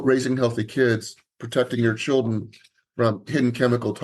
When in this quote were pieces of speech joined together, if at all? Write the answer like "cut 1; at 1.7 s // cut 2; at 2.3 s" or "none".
none